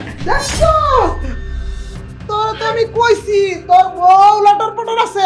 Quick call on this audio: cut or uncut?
uncut